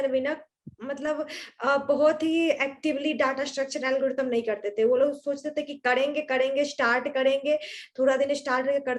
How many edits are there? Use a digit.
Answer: 0